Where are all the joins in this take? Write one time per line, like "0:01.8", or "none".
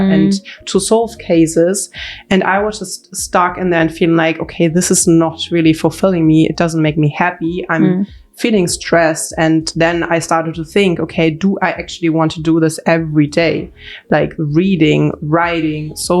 none